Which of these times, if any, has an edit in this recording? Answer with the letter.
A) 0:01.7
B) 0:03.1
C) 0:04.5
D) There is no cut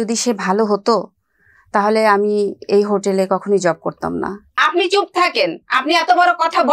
C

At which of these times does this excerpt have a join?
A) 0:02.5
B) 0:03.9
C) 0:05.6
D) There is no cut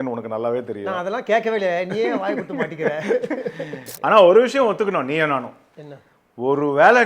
B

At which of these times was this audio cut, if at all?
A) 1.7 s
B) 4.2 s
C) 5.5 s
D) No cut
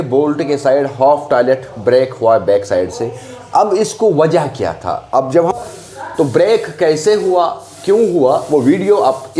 C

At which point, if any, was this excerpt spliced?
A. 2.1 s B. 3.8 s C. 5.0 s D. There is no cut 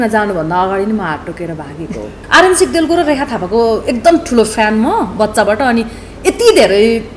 A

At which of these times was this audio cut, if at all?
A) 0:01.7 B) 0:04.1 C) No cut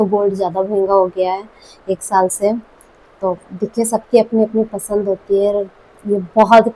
C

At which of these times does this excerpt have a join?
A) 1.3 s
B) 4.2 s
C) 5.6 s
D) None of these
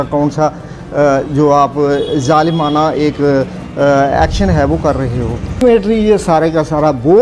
C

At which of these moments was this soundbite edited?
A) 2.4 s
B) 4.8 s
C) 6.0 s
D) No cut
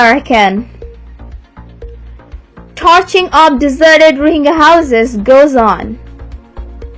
C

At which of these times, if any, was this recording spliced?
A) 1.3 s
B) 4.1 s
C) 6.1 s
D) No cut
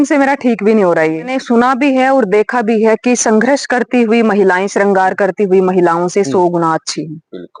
A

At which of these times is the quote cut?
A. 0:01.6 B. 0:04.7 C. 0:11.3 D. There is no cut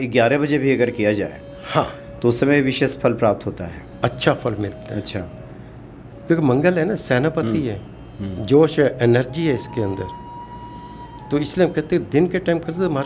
D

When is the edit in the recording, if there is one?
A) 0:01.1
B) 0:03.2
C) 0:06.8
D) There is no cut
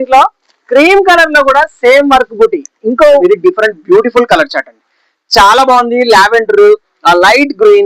B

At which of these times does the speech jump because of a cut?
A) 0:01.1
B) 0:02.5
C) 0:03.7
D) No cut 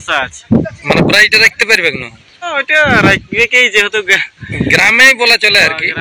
B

